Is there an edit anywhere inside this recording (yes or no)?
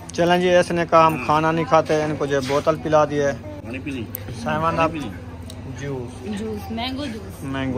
no